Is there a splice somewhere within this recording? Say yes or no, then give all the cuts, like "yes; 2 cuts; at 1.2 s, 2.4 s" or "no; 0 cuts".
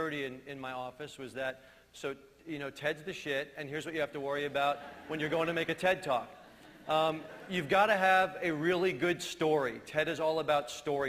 yes; 1 cut; at 2.2 s